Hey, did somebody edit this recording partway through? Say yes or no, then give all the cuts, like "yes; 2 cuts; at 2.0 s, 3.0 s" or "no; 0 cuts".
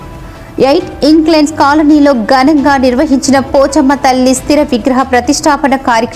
no; 0 cuts